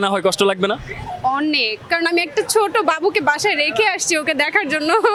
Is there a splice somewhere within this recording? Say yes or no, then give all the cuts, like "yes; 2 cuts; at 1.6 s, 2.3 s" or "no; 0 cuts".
no; 0 cuts